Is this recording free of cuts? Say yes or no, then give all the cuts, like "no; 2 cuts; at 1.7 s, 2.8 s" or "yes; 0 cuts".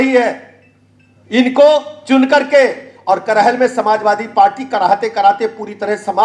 yes; 0 cuts